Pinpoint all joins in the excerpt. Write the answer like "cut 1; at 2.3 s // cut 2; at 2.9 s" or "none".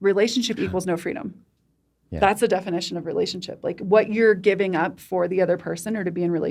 none